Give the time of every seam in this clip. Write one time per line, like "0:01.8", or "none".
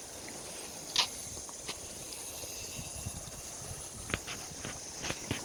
none